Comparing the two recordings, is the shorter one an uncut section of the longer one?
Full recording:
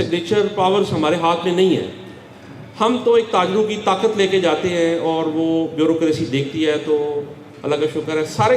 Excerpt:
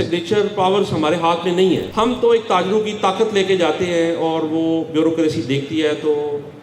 no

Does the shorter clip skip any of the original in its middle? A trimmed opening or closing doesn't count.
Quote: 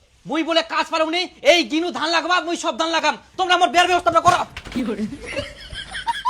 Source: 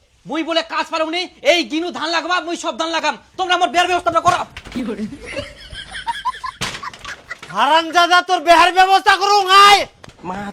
no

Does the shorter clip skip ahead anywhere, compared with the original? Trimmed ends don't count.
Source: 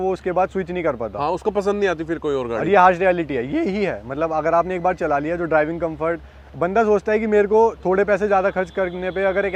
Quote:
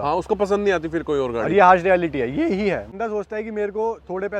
yes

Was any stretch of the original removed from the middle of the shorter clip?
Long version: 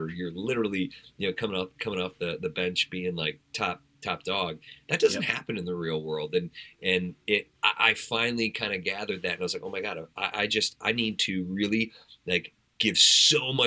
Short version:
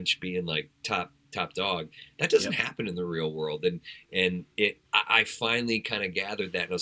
no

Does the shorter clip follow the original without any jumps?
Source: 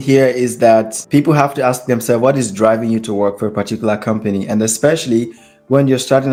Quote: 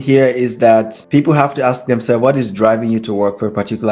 yes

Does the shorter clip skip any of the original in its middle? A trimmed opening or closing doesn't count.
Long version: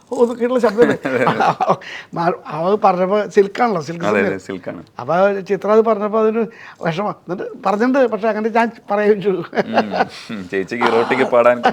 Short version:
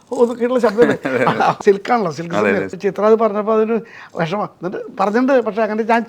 yes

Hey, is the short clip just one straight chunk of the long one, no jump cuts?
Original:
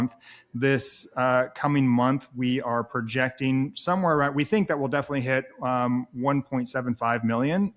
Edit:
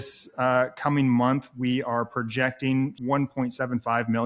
no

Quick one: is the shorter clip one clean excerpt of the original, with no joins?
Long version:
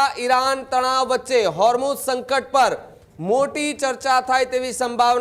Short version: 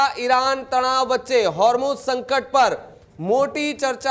yes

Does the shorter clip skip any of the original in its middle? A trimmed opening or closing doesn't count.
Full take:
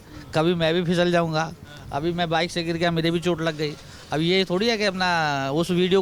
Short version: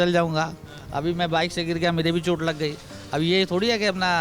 no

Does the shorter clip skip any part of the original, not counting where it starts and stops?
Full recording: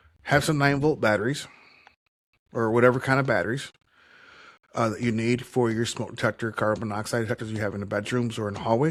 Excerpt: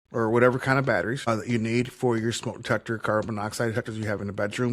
yes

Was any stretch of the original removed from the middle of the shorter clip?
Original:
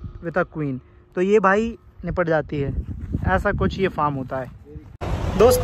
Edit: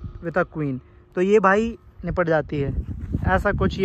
no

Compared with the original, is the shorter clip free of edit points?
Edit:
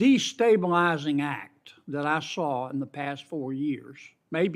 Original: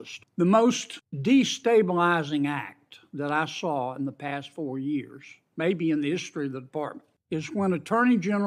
yes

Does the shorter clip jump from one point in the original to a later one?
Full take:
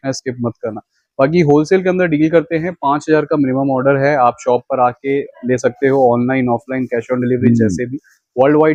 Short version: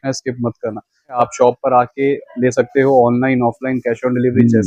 yes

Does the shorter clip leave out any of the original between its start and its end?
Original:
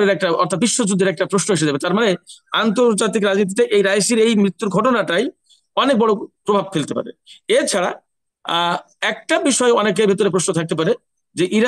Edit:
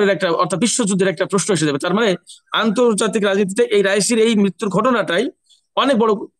no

